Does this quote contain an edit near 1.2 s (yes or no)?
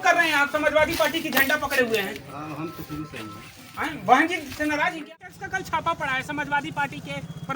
no